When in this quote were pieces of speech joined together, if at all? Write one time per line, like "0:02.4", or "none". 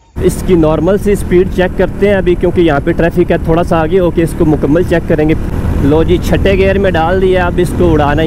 0:05.6

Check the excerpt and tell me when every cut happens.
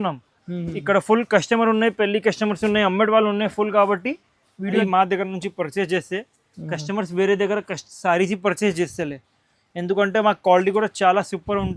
0:04.8

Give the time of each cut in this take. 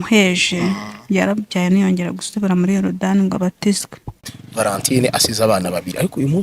0:04.4

